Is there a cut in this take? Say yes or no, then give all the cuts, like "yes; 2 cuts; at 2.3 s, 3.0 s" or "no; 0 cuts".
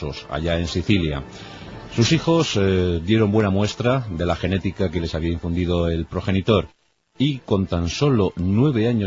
no; 0 cuts